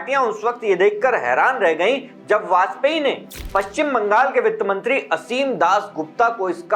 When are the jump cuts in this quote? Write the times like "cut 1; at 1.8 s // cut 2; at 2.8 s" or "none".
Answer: none